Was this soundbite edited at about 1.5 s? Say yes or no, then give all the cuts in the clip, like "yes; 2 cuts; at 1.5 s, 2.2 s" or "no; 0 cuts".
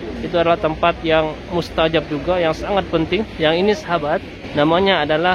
no; 2 cuts; at 3.3 s, 4.4 s